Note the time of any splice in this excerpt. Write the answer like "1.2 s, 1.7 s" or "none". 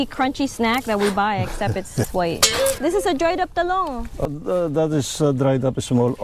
2.8 s, 4.3 s